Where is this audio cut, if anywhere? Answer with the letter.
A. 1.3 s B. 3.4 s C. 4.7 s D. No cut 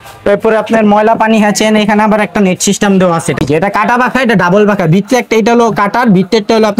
B